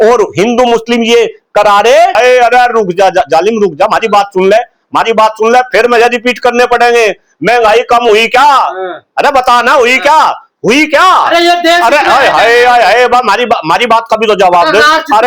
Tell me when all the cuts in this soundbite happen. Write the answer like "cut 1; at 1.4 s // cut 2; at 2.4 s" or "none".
cut 1; at 2.1 s